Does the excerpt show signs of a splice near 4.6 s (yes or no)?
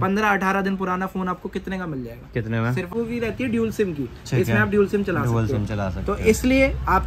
no